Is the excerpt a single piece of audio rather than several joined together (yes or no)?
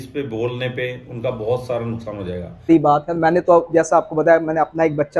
no